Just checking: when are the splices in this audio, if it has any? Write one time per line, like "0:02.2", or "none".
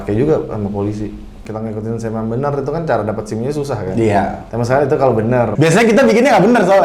0:01.4
0:05.5